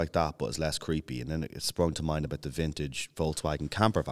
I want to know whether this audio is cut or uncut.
uncut